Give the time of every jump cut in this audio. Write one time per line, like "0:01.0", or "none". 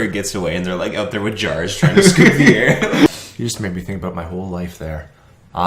0:03.1